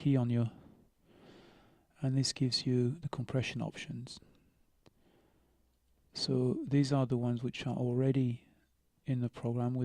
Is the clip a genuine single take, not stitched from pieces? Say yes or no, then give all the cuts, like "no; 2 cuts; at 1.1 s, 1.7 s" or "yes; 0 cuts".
yes; 0 cuts